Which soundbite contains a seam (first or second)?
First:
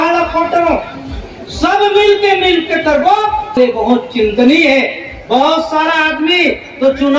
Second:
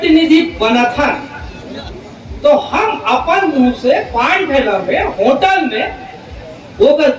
first